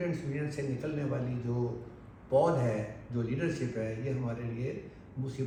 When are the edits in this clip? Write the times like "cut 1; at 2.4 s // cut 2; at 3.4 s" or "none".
none